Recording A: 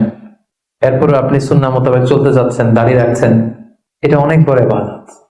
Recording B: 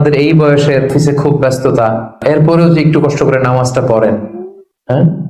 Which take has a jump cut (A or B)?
B